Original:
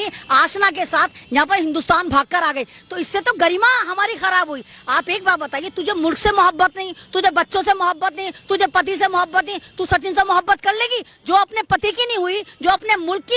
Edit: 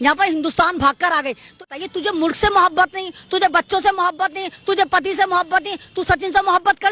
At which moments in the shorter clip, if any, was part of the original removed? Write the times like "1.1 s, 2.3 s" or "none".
1.7 s